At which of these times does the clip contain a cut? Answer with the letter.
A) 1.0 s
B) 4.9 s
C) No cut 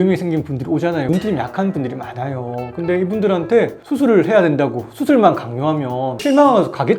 A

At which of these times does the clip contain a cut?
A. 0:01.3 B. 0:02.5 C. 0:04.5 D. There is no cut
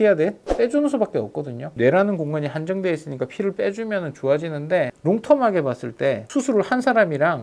D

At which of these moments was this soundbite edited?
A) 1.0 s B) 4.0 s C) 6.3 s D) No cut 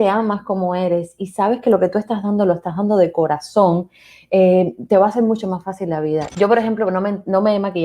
C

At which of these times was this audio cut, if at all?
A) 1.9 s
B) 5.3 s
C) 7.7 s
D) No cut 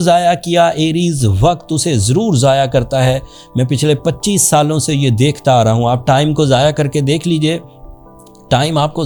D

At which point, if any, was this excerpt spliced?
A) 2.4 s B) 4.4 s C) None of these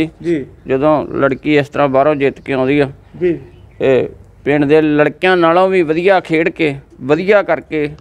C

